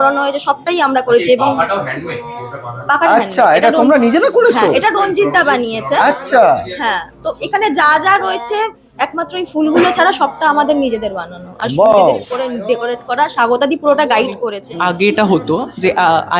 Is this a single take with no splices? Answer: no; 1 cut; at 14.6 s

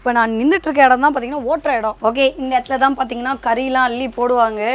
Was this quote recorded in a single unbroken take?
yes; 0 cuts

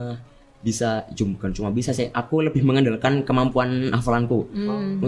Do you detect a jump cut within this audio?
no; 0 cuts

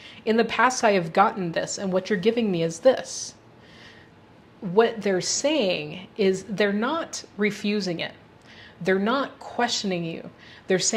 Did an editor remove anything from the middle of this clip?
no; 0 cuts

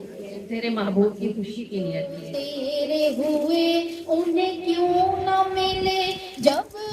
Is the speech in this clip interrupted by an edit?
yes; 1 cut; at 2.2 s

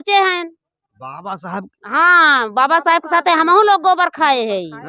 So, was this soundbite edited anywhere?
no; 0 cuts

